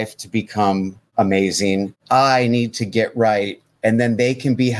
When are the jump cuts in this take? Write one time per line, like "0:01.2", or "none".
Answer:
0:01.0
0:02.0

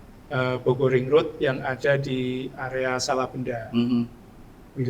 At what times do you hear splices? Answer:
none

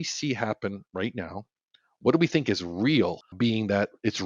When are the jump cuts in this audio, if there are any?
0:03.3

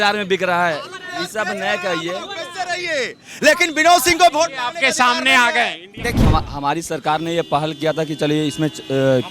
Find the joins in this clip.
0:06.2

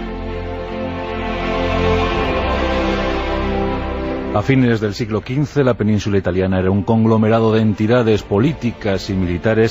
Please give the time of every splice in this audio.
none

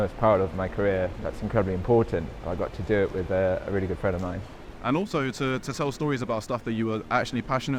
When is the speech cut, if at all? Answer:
0:01.2
0:04.7

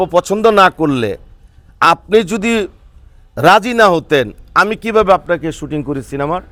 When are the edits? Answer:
none

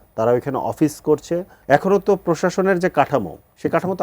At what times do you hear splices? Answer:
0:01.5

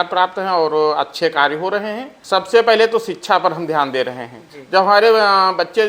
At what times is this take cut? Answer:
0:02.1

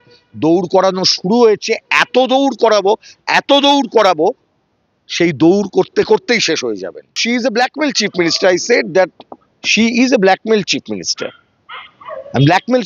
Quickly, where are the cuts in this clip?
0:07.2

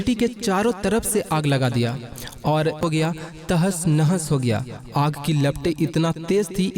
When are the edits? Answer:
0:02.8

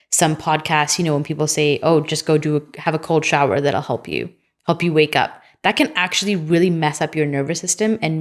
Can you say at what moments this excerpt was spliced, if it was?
none

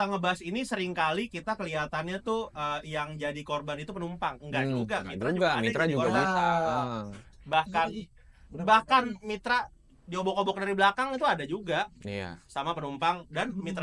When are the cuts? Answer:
none

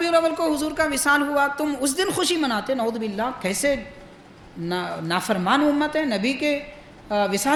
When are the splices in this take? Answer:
none

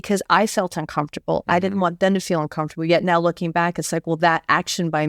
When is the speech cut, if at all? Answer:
none

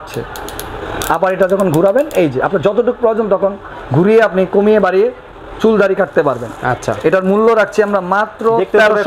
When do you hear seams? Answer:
none

